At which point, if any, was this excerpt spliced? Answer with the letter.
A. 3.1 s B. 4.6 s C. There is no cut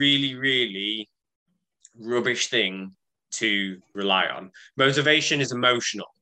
C